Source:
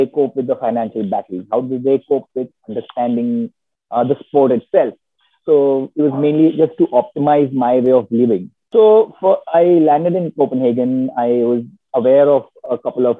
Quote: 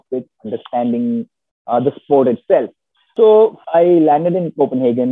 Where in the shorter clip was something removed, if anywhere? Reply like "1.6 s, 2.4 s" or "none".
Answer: 3.0 s, 3.6 s

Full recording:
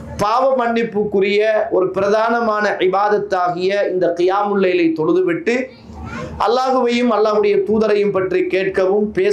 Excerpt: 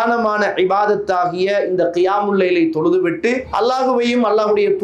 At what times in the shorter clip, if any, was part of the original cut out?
3.5 s

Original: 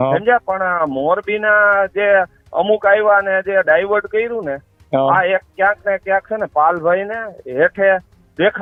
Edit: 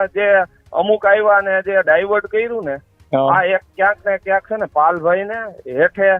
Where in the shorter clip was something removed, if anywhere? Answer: none

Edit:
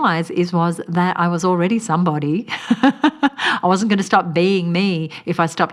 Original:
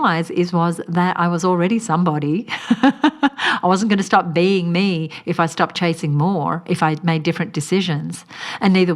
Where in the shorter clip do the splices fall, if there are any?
none

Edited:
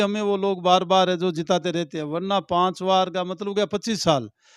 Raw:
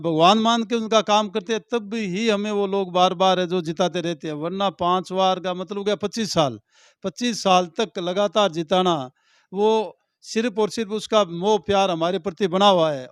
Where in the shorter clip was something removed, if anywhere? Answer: none

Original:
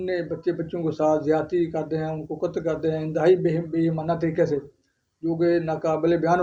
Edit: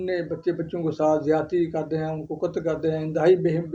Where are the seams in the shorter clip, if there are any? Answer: none

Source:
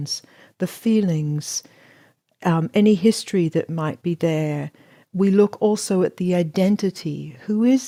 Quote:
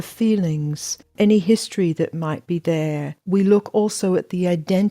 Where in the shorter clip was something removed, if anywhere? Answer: 1.1 s, 3.1 s

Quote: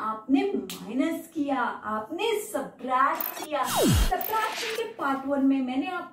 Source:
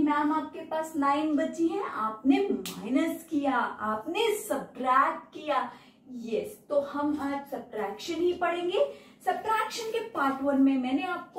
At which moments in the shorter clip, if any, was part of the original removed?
3.9 s

